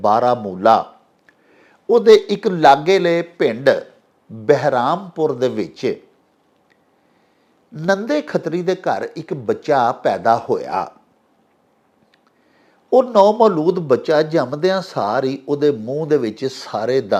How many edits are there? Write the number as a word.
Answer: zero